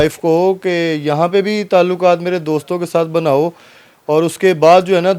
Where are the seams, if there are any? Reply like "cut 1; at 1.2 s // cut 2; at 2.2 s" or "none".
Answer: none